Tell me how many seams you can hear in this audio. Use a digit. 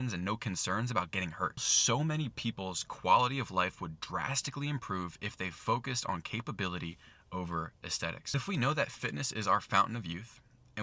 2